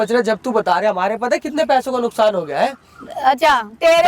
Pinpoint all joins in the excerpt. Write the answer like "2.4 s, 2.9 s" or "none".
none